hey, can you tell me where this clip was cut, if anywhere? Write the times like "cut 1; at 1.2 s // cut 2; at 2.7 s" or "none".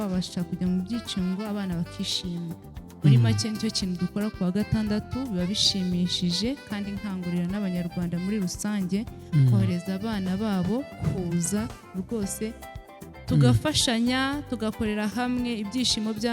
none

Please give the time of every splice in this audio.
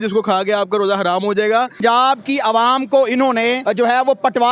cut 1; at 1.8 s // cut 2; at 3.6 s

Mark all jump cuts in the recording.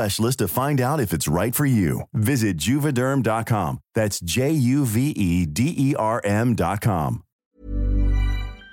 cut 1; at 7.3 s

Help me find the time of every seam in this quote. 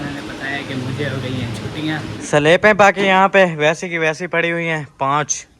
cut 1; at 2.1 s

